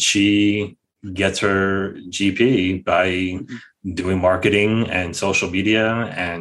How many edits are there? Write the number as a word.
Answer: zero